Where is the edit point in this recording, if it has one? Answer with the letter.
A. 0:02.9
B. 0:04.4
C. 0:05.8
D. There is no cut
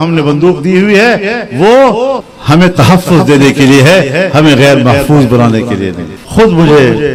D